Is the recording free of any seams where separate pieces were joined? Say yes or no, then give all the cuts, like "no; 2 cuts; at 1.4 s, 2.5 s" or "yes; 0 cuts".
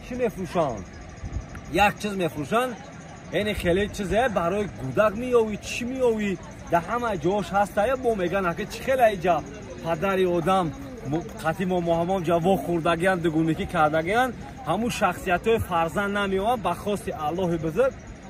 yes; 0 cuts